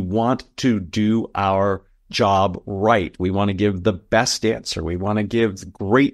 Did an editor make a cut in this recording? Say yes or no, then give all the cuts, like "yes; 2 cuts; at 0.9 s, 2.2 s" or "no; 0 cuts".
no; 0 cuts